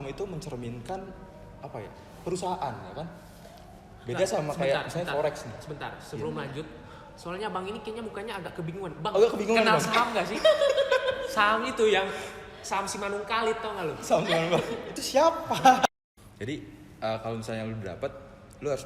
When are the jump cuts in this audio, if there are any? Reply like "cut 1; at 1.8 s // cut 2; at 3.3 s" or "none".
cut 1; at 15.8 s